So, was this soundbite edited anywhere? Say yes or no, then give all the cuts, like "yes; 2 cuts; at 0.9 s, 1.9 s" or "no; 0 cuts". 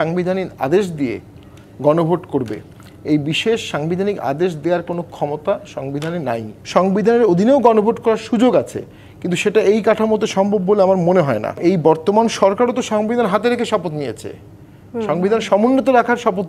yes; 2 cuts; at 6.5 s, 11.6 s